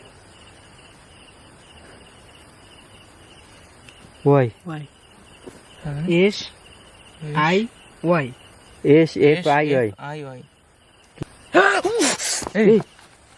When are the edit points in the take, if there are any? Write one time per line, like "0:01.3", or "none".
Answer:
0:11.2